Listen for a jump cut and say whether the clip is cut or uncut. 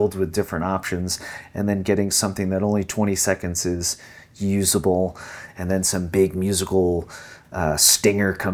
uncut